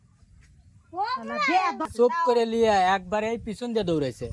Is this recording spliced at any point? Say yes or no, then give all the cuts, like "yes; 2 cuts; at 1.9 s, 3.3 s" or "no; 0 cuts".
yes; 1 cut; at 1.9 s